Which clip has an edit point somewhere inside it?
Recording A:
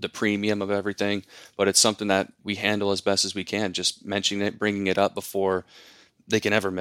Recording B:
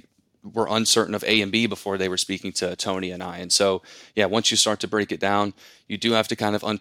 A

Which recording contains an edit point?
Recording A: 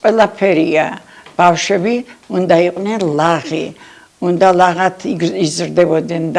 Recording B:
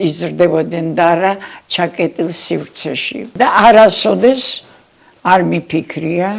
B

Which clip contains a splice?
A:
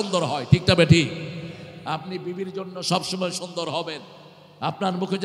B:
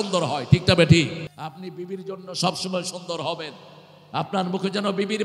B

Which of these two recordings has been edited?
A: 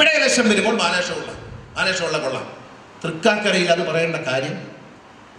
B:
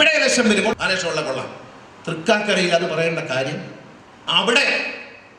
B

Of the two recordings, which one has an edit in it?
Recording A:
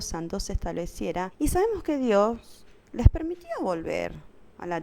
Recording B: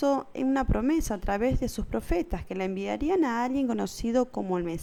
A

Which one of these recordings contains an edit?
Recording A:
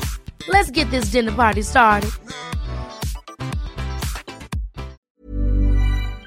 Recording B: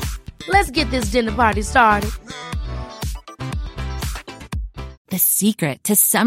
A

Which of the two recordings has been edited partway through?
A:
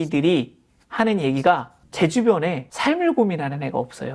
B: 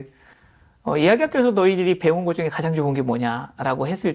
A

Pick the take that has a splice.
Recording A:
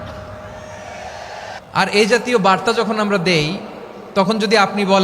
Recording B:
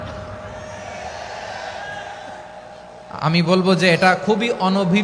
A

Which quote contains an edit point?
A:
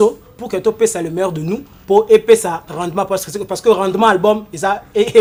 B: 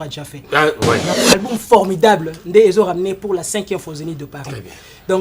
B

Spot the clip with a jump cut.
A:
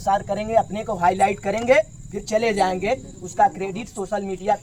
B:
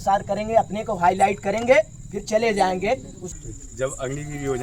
B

